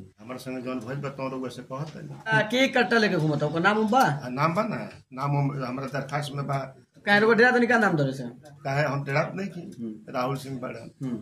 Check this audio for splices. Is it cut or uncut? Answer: cut